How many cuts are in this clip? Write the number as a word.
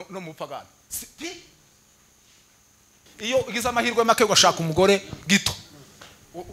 one